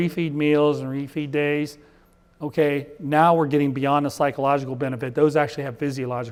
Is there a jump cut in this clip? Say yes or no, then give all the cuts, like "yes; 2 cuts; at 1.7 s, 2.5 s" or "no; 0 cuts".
no; 0 cuts